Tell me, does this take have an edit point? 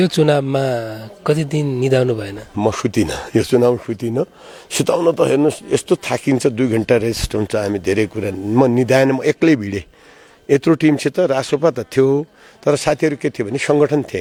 no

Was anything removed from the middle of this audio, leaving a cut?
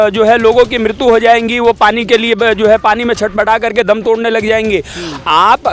no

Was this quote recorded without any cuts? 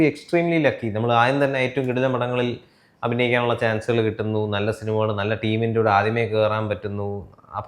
yes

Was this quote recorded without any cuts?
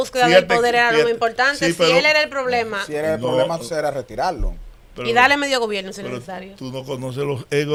yes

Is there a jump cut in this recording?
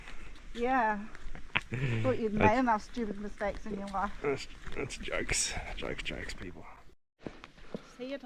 no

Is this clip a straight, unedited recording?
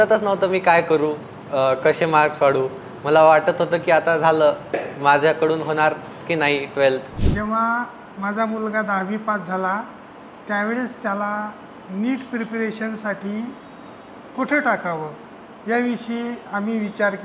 no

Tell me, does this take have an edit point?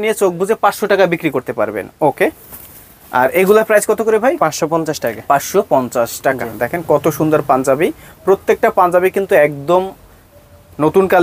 no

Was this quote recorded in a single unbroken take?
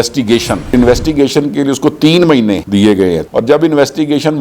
no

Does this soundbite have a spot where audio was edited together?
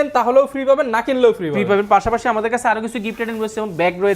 no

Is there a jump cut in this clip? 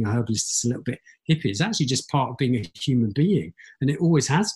no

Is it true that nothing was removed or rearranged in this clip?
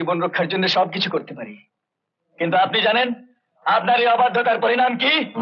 yes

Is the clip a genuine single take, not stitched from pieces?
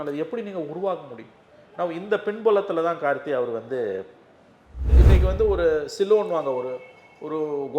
no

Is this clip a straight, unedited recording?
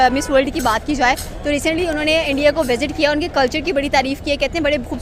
yes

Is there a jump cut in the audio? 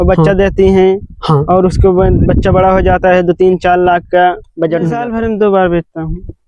yes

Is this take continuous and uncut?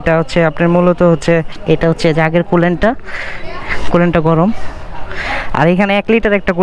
no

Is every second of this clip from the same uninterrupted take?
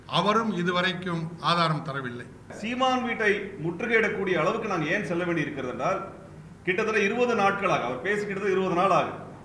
no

